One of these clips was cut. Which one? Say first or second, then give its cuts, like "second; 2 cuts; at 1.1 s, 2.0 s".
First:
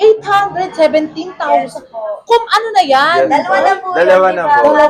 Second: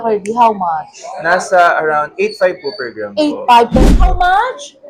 second; 1 cut; at 3.7 s